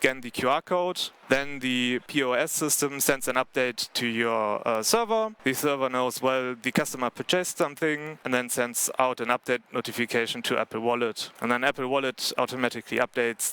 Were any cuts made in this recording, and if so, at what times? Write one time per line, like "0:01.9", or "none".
0:01.1
0:02.1
0:05.3
0:08.2
0:11.3

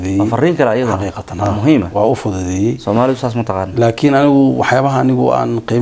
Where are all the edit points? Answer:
none

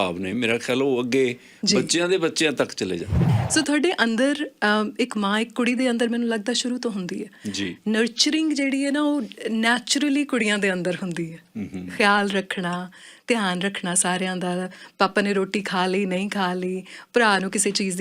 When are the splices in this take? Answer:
0:03.1

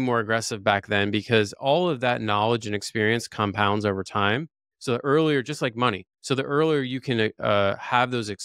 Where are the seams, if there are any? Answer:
none

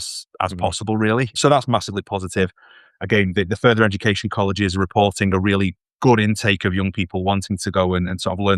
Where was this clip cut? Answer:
0:01.4

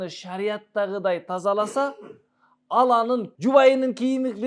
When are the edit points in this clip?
0:03.3

